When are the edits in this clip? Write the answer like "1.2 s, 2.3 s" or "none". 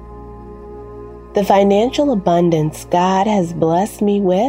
1.0 s